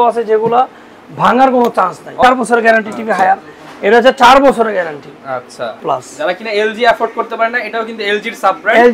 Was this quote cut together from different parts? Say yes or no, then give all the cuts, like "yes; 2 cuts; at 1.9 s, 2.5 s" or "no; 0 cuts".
yes; 2 cuts; at 2.2 s, 5.8 s